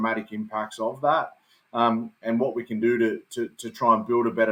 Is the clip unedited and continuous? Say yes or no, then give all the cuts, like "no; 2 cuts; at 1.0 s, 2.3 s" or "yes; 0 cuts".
yes; 0 cuts